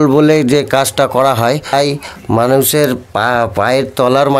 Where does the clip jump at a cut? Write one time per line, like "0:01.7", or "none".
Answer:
0:01.7